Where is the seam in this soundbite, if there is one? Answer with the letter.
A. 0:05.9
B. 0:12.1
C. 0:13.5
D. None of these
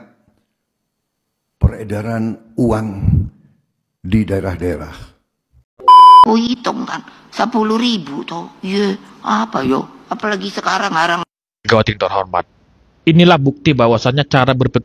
A